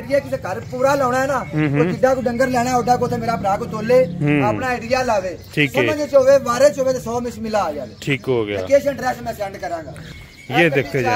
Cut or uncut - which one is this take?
cut